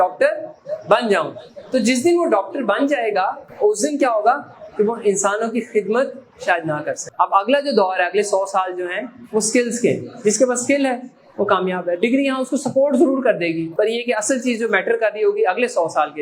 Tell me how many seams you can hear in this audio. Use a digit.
3